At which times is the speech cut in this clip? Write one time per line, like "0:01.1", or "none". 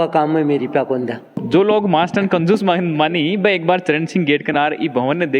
none